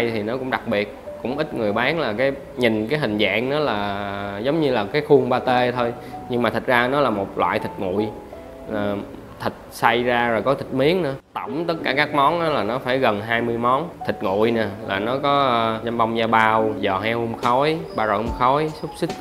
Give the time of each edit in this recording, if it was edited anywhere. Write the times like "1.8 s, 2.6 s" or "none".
11.2 s, 13.9 s, 15.8 s, 16.8 s, 17.9 s